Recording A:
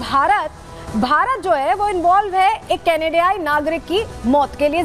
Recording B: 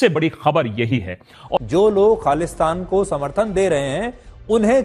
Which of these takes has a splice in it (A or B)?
B